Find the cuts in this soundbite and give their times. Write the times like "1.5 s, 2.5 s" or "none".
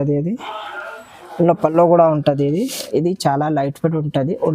2.8 s